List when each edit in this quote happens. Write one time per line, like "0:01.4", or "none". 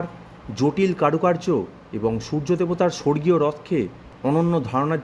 0:04.1